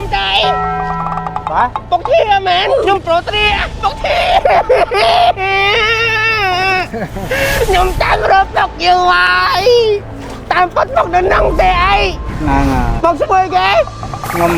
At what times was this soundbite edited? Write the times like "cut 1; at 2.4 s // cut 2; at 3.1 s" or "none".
none